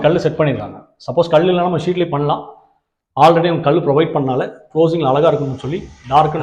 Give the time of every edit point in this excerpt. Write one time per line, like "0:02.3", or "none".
none